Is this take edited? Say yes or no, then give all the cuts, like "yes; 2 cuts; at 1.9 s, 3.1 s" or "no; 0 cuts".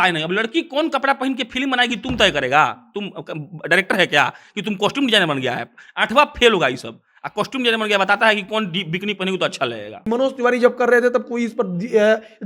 yes; 1 cut; at 9.9 s